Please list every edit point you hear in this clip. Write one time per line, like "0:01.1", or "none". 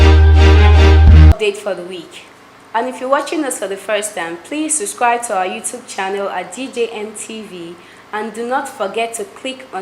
0:01.3